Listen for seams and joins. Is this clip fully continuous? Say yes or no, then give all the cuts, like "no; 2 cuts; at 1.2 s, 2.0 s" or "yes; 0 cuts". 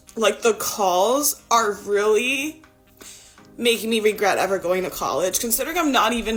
yes; 0 cuts